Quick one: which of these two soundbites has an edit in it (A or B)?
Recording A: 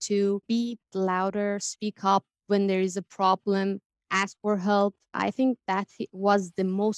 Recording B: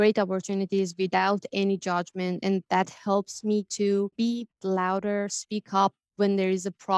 A